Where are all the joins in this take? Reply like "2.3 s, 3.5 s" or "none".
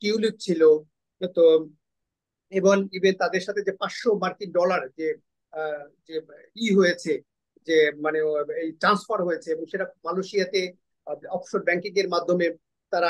none